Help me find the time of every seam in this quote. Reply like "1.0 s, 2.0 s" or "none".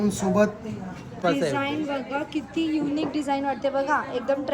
1.2 s